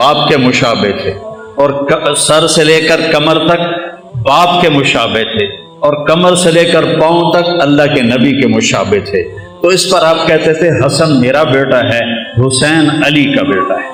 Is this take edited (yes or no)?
no